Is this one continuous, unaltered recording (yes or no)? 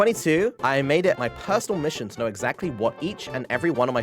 yes